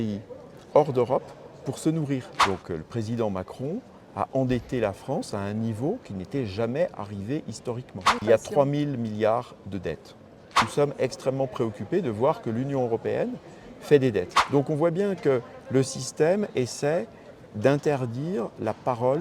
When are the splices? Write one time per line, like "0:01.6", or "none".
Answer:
0:02.3
0:08.2
0:10.6
0:14.4

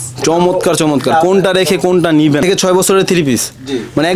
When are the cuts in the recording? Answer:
0:02.4

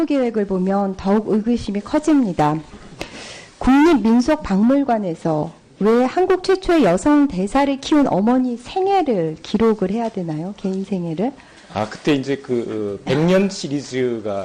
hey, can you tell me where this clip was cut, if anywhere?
none

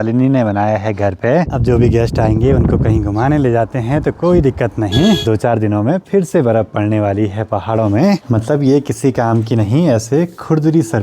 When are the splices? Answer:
0:01.5
0:05.2
0:08.2

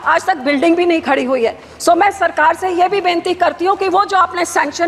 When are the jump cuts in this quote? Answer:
none

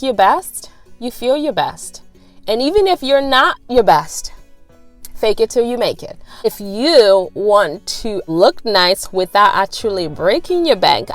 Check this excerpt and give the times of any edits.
0:06.2
0:08.1

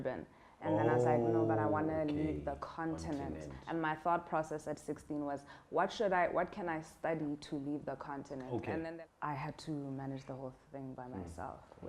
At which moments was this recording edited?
0:08.8

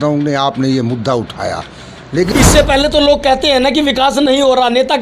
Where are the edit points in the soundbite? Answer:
0:02.3

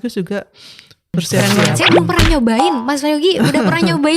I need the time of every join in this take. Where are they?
0:01.4

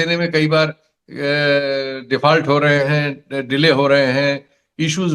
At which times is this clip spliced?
none

